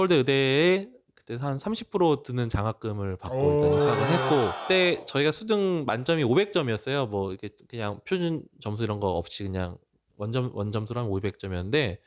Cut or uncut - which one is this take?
uncut